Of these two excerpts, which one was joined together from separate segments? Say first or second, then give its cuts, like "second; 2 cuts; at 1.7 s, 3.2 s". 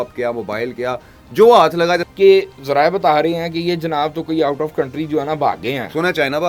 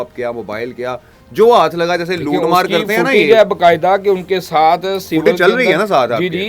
first; 1 cut; at 2.1 s